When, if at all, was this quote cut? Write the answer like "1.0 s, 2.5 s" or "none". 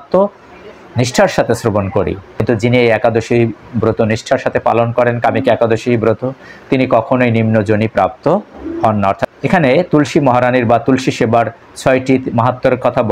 2.3 s, 9.3 s